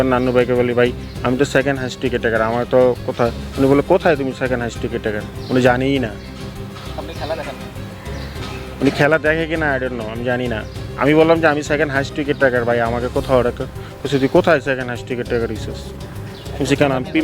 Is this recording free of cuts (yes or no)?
yes